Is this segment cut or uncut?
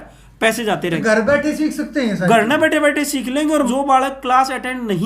cut